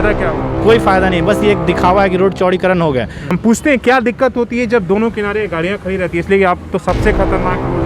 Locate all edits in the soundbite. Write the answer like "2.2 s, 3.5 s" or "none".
3.2 s